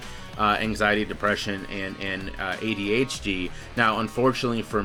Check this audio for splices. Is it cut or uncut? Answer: uncut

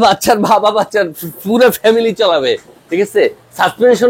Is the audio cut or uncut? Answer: uncut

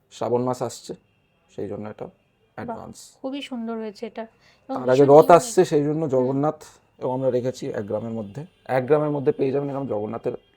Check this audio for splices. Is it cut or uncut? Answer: uncut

